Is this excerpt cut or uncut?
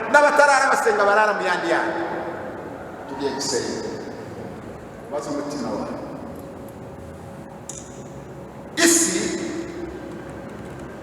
cut